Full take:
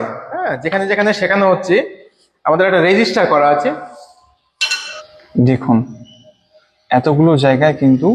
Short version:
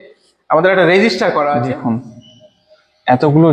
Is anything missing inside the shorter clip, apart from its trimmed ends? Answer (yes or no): yes